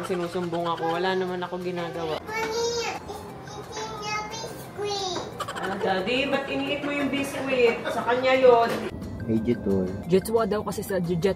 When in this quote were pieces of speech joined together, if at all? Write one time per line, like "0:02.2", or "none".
0:02.2
0:03.0
0:08.9
0:10.0